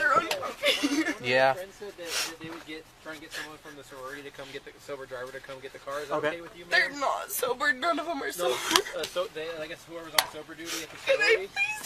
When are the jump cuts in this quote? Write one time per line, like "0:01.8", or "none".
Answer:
none